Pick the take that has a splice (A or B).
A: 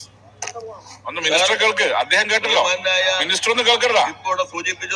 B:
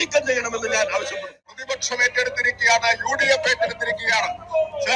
B